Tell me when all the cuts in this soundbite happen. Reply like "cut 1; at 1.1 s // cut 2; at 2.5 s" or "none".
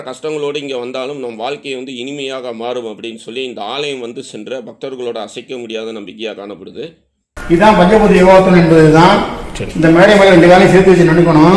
cut 1; at 7.4 s